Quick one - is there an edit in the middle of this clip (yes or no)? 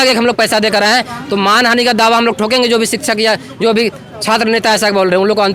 no